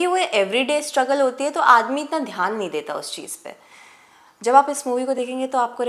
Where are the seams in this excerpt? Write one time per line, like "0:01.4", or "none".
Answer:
none